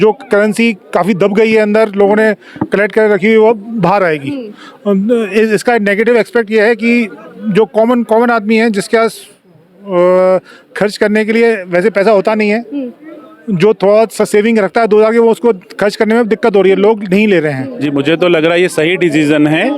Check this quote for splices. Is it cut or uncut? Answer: cut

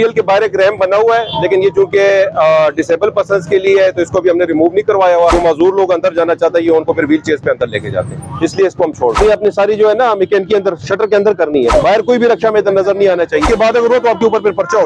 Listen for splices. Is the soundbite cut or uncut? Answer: cut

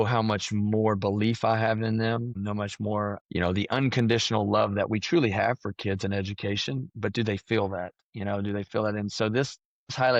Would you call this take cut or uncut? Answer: uncut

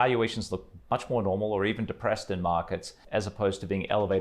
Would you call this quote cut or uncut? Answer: cut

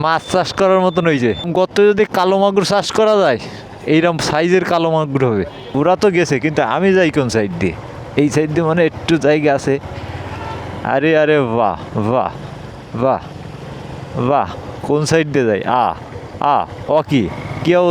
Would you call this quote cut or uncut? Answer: cut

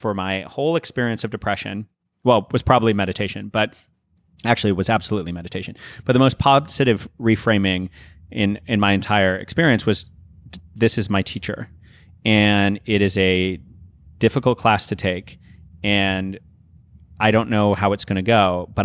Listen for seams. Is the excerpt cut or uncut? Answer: uncut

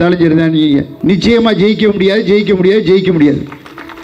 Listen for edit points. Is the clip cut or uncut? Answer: cut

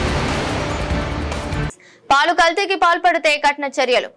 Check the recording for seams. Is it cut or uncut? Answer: cut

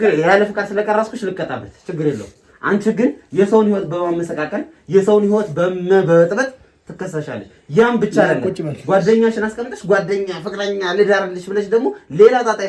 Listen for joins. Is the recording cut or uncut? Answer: uncut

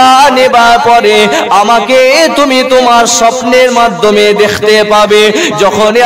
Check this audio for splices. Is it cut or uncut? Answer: uncut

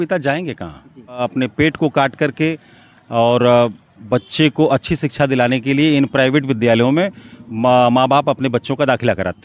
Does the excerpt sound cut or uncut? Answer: cut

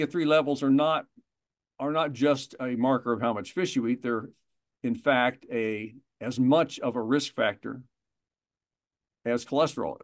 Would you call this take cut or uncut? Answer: uncut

